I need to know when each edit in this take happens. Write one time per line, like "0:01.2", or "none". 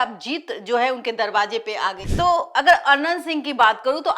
0:02.0